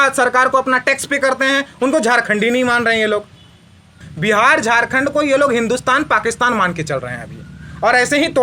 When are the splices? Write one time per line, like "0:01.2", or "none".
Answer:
0:03.9